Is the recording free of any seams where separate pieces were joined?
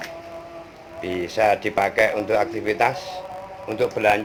yes; 0 cuts

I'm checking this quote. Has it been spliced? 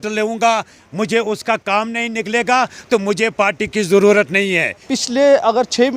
yes; 1 cut; at 4.9 s

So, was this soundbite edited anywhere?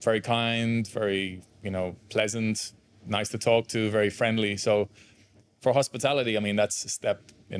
no; 0 cuts

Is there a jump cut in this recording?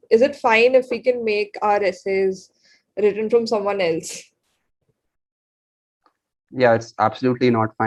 no; 0 cuts

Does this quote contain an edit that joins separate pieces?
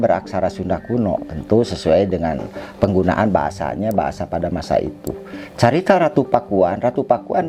no; 0 cuts

